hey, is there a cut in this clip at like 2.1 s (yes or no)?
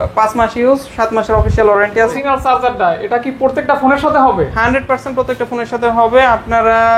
yes